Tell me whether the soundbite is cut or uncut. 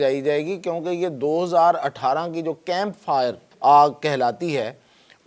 cut